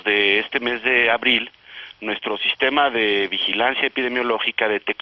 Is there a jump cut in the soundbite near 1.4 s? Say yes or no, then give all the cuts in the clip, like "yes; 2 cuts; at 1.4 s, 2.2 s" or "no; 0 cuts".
yes; 1 cut; at 1.4 s